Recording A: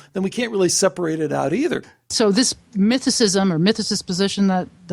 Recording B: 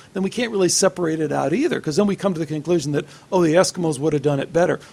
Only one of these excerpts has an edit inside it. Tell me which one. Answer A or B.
A